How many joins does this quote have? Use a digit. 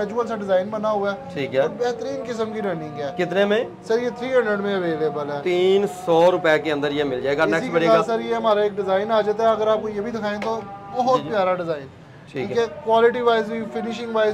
0